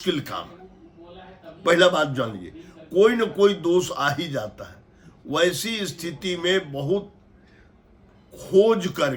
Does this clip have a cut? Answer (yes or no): no